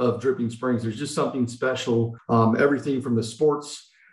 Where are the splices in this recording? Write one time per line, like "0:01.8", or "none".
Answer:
0:02.2

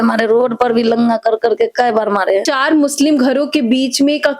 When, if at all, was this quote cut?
0:02.5

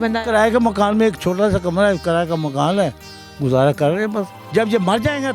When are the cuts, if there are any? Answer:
0:04.4

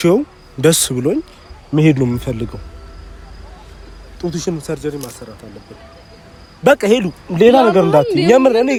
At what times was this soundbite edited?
none

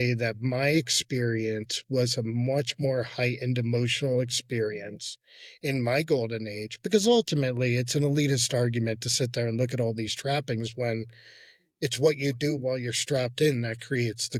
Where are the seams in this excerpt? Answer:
none

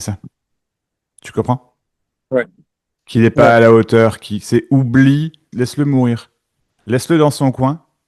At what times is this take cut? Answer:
0:05.5

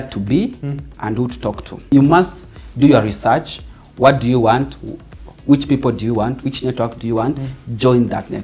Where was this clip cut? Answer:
0:01.9

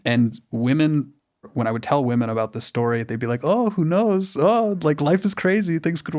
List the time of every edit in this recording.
0:01.5

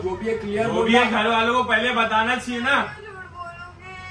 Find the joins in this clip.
none

